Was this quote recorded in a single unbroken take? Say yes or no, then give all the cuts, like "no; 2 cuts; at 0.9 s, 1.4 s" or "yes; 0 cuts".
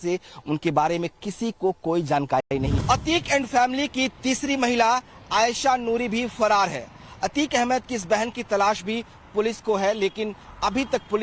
no; 2 cuts; at 2.4 s, 7.7 s